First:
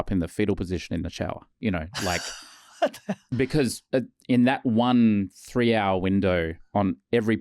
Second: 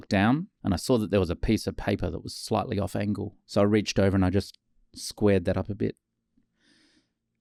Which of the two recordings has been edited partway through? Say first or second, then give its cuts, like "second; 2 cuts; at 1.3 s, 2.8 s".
first; 3 cuts; at 1.5 s, 3.2 s, 6.6 s